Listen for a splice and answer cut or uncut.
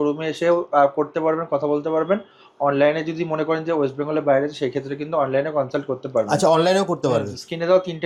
uncut